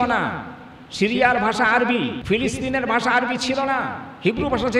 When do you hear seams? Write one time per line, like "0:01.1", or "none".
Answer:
0:02.2